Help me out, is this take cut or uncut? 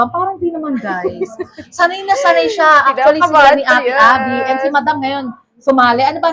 uncut